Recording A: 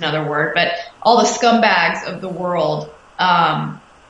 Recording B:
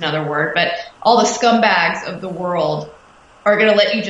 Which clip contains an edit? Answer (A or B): B